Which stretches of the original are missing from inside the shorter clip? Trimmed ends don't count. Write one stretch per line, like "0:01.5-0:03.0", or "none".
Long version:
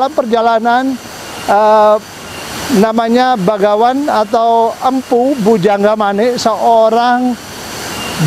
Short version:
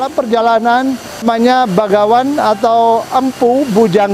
0:01.2-0:02.9